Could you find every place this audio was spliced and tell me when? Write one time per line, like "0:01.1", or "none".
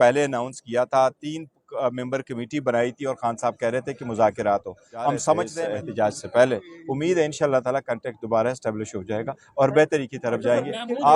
0:05.5